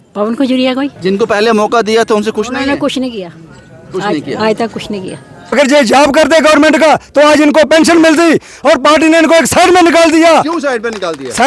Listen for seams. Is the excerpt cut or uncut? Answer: cut